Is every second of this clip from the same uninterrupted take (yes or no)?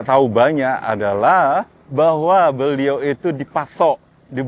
yes